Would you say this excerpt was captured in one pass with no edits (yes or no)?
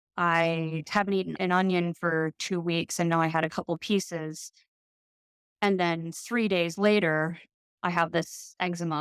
no